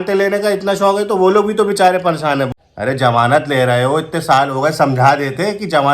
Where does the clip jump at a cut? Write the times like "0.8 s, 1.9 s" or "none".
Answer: 2.5 s